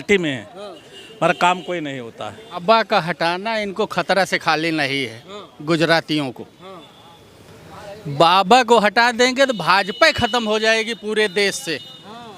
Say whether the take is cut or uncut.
cut